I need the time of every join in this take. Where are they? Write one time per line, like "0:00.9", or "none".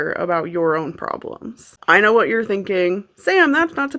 0:01.6